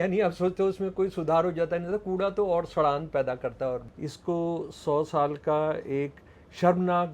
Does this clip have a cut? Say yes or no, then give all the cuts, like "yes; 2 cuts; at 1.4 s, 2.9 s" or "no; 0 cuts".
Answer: yes; 1 cut; at 3.9 s